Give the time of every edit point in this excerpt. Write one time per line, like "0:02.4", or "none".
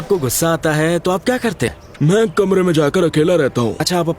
0:01.8